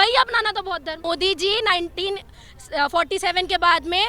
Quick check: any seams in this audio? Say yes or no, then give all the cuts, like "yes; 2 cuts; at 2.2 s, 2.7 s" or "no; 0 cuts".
yes; 1 cut; at 1.0 s